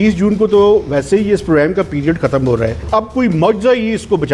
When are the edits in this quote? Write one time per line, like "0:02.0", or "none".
0:02.8